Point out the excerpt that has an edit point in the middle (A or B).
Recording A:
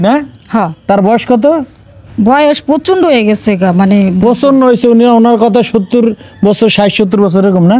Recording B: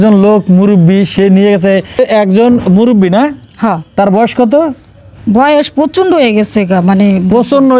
B